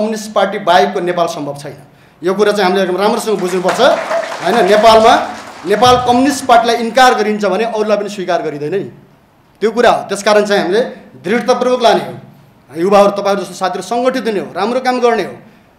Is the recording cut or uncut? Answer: uncut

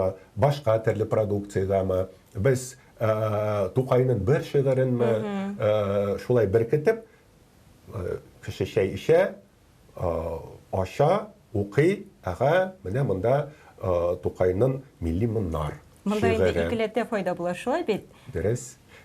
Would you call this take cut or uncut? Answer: uncut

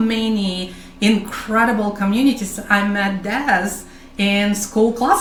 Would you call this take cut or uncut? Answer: uncut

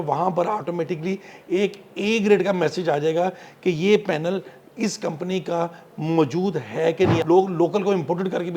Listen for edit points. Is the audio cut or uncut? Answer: cut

